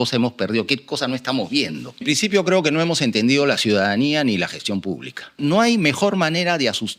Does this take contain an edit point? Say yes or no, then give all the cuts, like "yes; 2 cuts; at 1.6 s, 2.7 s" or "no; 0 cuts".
yes; 2 cuts; at 2.0 s, 5.4 s